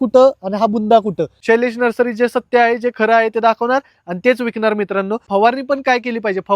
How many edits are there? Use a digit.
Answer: 2